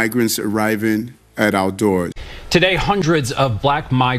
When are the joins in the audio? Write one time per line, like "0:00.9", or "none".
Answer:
0:02.1

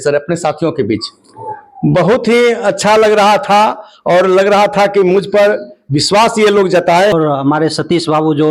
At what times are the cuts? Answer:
0:07.5

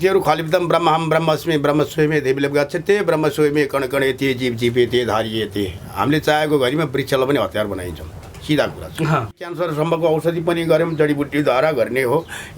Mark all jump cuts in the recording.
0:09.5

